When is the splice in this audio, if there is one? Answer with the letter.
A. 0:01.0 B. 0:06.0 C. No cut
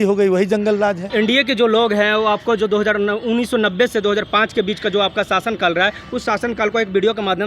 A